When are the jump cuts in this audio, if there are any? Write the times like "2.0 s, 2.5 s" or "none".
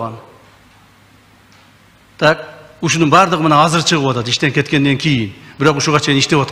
none